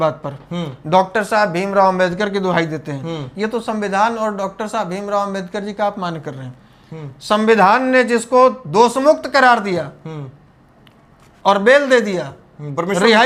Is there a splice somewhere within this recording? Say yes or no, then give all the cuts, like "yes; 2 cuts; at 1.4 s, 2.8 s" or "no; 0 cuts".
no; 0 cuts